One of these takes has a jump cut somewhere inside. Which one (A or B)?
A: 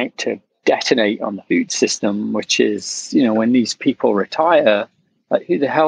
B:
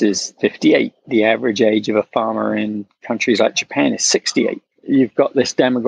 B